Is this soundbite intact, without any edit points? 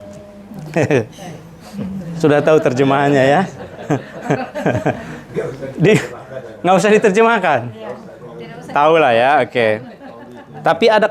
yes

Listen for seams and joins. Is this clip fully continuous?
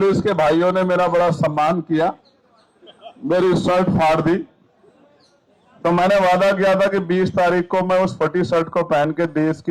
yes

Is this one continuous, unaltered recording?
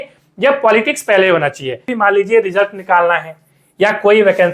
no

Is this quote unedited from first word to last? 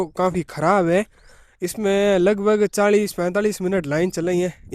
yes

